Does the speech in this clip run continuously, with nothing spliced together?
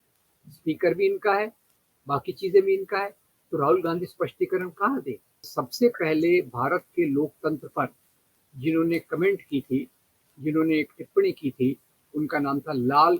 no; 1 cut; at 5.6 s

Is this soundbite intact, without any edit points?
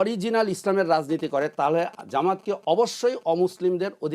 yes; 0 cuts

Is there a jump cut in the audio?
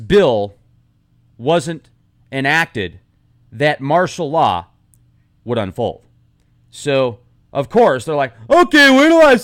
yes; 1 cut; at 7.1 s

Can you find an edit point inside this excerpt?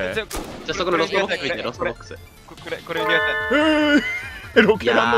no; 0 cuts

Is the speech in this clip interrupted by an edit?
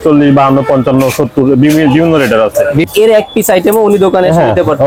yes; 1 cut; at 2.9 s

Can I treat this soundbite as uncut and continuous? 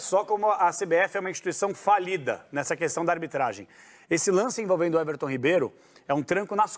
yes; 0 cuts

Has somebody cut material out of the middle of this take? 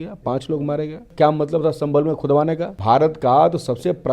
yes; 2 cuts; at 1.0 s, 2.7 s

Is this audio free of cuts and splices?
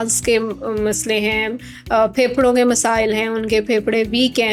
yes; 0 cuts

